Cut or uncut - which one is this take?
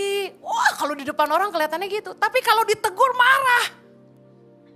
uncut